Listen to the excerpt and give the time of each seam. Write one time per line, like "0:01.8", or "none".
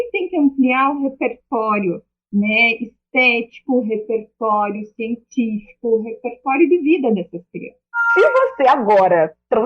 0:02.1
0:08.0